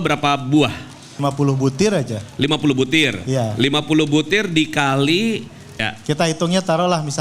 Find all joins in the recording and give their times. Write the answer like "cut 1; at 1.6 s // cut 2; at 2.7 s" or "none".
cut 1; at 1.2 s // cut 2; at 5.7 s